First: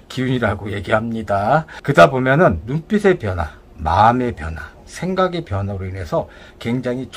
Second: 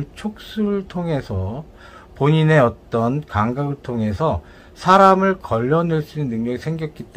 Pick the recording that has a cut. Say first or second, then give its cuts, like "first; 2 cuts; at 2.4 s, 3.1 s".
first; 1 cut; at 1.7 s